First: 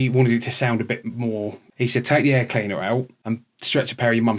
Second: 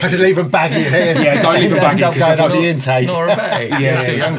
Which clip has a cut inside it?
first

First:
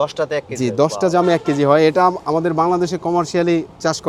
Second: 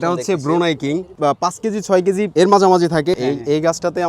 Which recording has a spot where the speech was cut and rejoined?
second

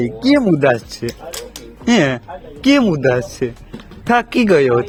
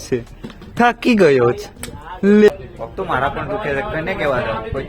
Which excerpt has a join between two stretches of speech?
second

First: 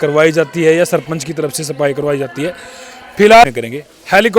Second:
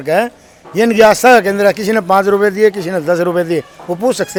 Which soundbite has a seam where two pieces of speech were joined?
first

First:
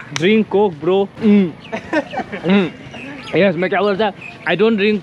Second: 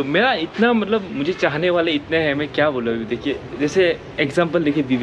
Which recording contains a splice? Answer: first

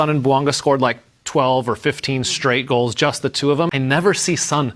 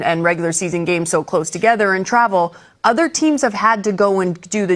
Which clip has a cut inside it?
first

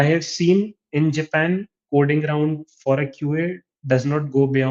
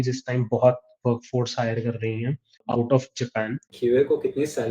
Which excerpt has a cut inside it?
second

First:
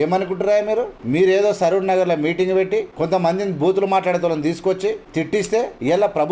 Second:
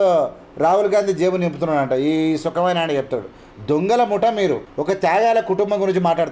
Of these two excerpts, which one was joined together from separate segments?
first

